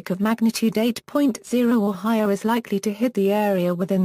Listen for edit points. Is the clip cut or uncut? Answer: cut